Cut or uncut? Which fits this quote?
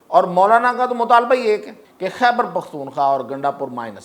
cut